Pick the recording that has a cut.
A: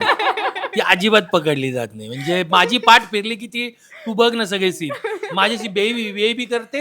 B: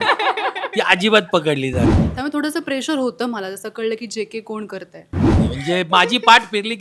B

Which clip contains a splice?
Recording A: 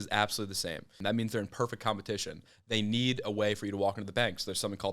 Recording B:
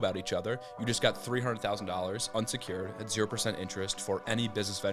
A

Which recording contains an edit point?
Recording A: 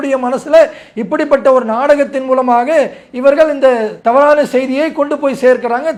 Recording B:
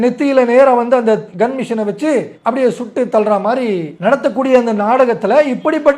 B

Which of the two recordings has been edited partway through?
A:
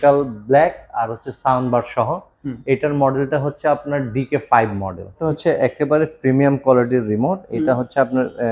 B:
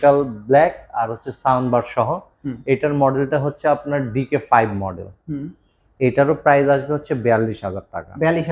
A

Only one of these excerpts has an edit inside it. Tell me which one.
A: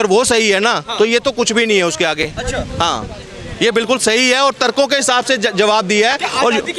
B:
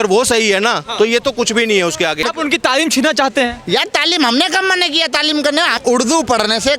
B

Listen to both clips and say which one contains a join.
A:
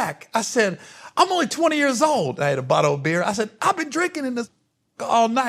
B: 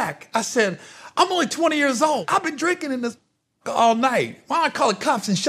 B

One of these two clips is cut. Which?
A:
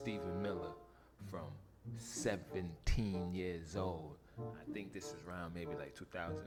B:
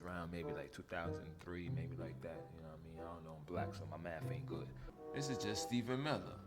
B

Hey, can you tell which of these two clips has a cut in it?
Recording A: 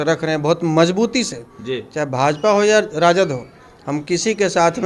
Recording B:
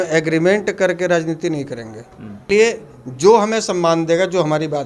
B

